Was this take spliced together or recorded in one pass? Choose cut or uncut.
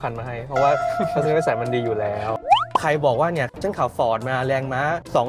cut